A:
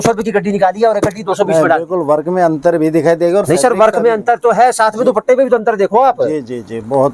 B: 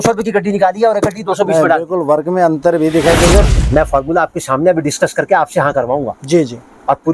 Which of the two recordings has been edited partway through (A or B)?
B